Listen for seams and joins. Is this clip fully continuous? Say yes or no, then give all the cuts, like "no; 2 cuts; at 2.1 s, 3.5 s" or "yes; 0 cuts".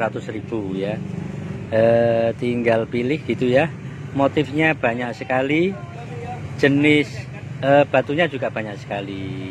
yes; 0 cuts